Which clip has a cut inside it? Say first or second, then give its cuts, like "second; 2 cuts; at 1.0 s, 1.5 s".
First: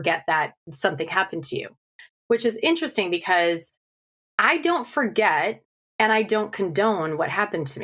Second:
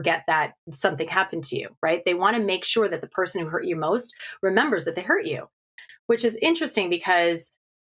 first; 1 cut; at 1.7 s